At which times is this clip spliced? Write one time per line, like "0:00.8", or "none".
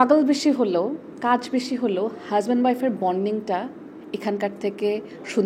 none